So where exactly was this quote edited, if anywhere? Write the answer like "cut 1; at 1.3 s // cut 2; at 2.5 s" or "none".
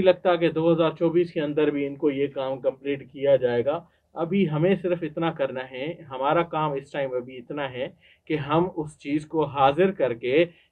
none